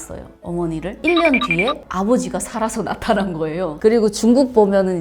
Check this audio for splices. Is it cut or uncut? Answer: cut